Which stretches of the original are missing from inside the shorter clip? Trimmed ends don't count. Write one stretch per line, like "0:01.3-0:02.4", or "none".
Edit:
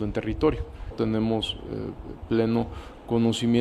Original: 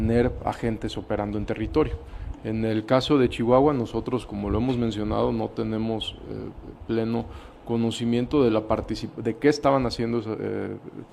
0:02.3-0:05.5